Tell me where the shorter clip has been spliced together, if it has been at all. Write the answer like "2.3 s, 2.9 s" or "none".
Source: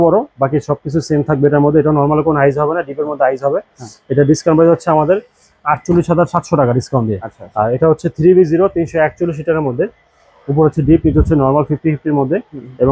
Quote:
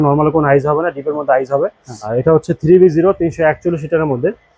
1.9 s